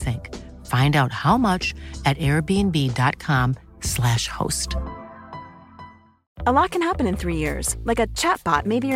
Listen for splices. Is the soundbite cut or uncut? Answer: cut